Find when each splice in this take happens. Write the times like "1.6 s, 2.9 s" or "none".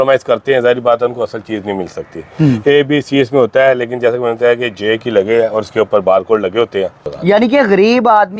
7.1 s